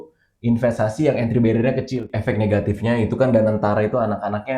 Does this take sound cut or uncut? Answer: cut